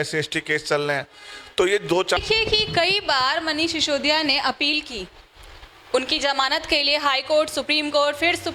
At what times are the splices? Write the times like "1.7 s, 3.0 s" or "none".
2.2 s